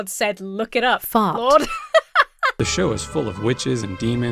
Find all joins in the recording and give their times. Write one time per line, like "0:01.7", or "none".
0:02.5

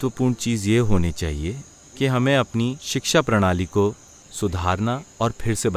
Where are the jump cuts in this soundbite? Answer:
none

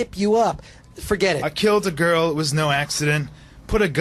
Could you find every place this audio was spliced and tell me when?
0:01.5

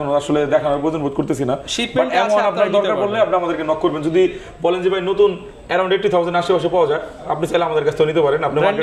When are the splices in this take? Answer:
none

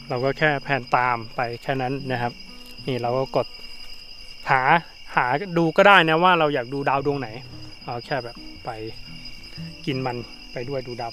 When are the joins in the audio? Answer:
none

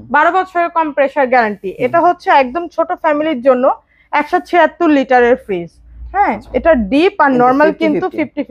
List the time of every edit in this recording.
none

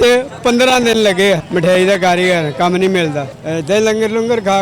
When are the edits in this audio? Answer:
0:01.5
0:03.3

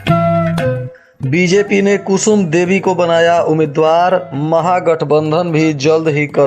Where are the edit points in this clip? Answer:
0:00.9

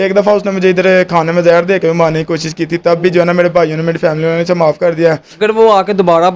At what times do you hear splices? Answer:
0:05.3

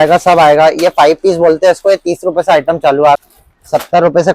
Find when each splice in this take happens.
0:03.2

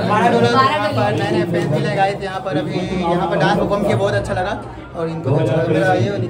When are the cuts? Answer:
none

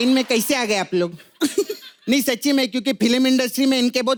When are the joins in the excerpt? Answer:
none

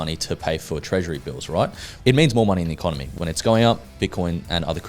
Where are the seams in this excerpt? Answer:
0:01.8
0:03.0

